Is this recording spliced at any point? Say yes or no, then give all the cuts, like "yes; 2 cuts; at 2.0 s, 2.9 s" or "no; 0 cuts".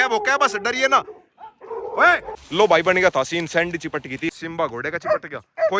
yes; 2 cuts; at 2.3 s, 4.3 s